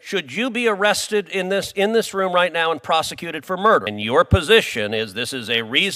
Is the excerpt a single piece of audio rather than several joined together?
no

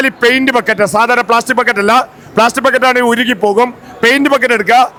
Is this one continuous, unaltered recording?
yes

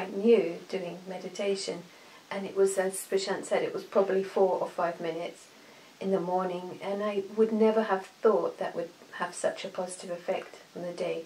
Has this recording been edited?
no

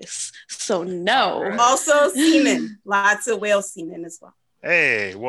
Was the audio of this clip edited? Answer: no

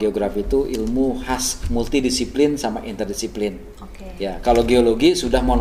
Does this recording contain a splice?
no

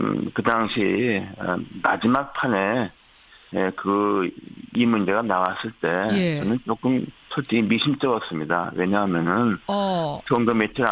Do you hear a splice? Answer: no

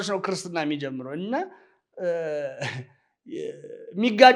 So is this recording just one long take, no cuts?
yes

